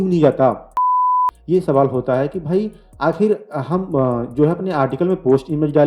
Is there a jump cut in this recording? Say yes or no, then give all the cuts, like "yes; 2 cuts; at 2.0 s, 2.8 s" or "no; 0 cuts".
yes; 1 cut; at 1.0 s